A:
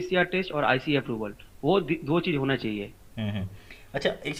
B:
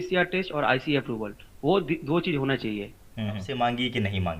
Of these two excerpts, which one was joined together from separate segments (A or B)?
B